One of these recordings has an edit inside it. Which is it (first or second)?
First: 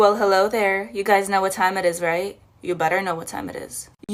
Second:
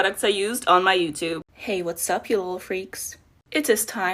second